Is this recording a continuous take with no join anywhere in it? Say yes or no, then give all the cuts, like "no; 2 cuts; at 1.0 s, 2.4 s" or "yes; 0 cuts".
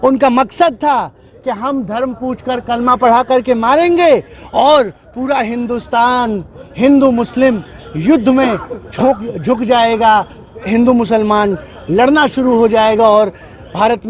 yes; 0 cuts